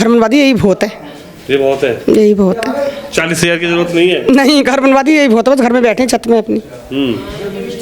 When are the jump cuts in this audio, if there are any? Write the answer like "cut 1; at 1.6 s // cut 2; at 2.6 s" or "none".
none